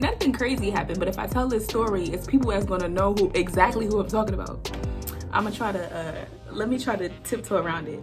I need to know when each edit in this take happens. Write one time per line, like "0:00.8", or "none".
none